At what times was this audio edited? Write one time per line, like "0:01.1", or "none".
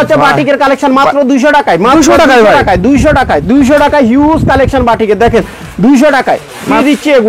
none